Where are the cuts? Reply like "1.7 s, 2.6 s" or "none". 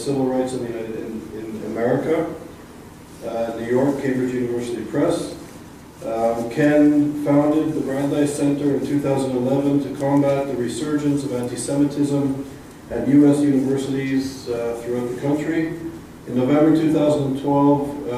none

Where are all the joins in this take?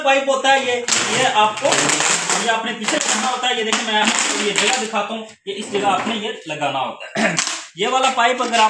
none

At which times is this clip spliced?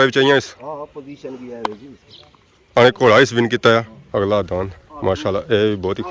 4.0 s

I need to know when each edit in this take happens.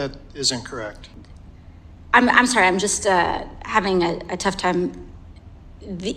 1.0 s

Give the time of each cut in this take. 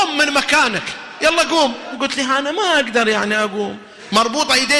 none

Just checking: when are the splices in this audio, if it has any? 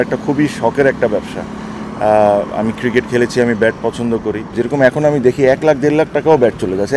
4.5 s

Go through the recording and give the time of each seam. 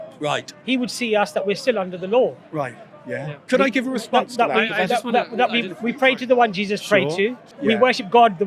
7.5 s

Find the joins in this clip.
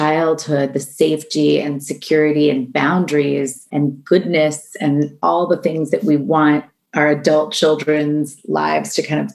3.6 s

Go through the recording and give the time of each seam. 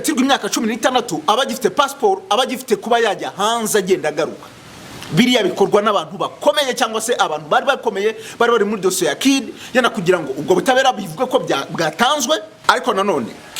12.6 s

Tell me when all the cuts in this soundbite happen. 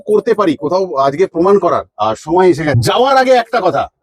2.8 s

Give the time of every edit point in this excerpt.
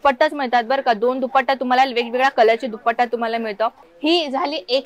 3.8 s

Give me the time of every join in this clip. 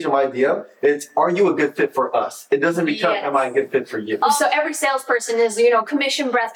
4.4 s

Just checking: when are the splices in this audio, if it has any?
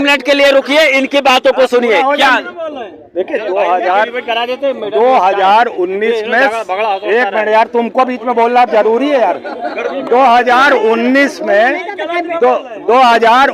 none

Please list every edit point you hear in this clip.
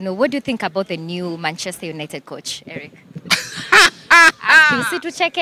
none

